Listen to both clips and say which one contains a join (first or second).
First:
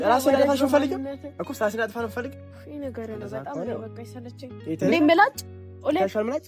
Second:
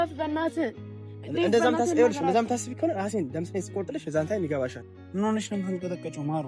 second